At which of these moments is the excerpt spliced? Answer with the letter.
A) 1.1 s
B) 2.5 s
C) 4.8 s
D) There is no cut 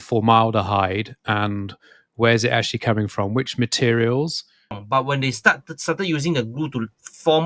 C